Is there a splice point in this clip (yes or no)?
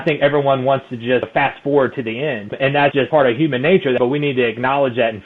yes